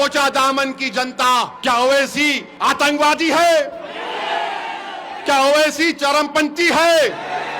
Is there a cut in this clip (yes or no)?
yes